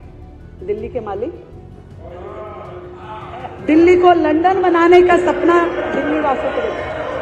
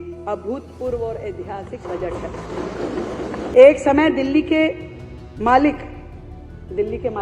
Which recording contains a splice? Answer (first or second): second